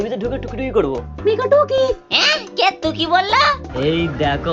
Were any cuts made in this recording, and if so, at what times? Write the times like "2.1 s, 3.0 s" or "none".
1.1 s, 3.6 s